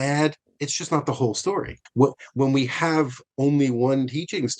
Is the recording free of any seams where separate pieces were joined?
no; 1 cut; at 1.8 s

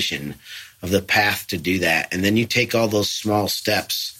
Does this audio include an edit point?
no; 0 cuts

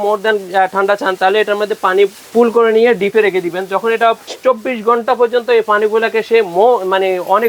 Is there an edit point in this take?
yes; 2 cuts; at 2.2 s, 4.3 s

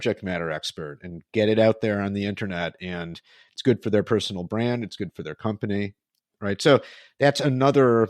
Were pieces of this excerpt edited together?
no; 0 cuts

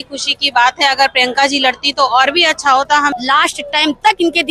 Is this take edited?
yes; 1 cut; at 3.1 s

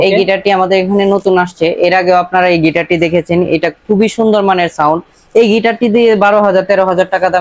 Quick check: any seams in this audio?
no; 0 cuts

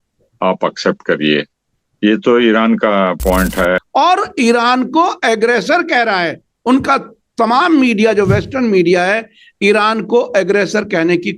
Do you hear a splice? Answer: yes; 1 cut; at 3.8 s

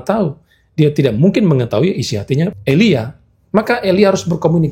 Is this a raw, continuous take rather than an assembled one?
no; 1 cut; at 2.6 s

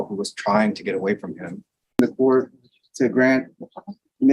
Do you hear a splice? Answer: yes; 1 cut; at 2.0 s

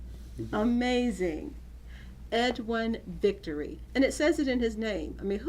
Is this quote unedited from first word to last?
no; 1 cut; at 3.8 s

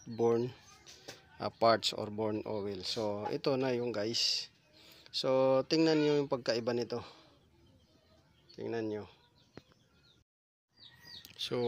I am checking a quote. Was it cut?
yes; 1 cut; at 10.8 s

